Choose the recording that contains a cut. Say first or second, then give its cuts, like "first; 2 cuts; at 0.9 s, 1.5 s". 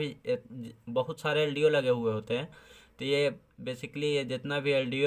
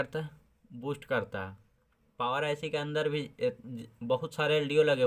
second; 1 cut; at 2.0 s